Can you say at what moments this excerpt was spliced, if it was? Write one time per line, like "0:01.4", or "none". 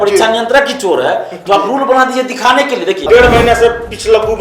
0:03.0